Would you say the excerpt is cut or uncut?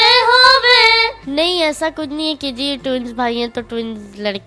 cut